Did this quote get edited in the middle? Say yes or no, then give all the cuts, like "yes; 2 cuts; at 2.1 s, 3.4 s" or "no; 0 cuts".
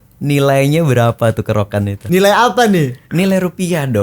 yes; 1 cut; at 2.0 s